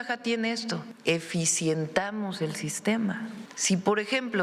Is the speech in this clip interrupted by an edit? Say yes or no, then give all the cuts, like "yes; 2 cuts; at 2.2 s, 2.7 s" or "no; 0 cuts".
yes; 2 cuts; at 0.9 s, 3.5 s